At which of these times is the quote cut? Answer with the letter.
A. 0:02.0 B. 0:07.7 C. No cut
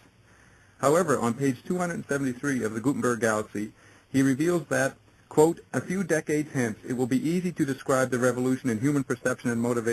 C